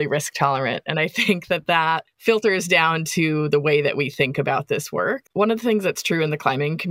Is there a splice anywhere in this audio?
yes; 1 cut; at 5.2 s

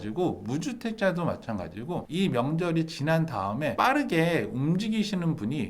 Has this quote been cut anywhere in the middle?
no; 0 cuts

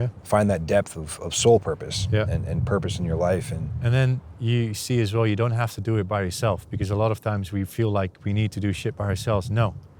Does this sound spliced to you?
yes; 1 cut; at 3.7 s

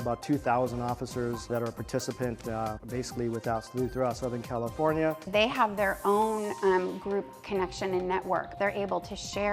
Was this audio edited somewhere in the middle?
yes; 4 cuts; at 1.5 s, 2.8 s, 5.2 s, 8.5 s

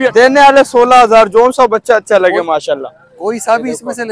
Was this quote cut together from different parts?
no; 0 cuts

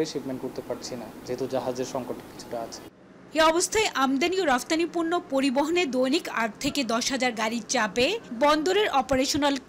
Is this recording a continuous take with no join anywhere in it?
yes; 0 cuts

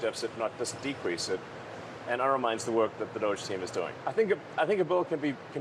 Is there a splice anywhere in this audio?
yes; 1 cut; at 3.9 s

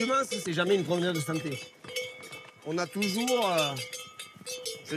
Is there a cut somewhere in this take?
no; 0 cuts

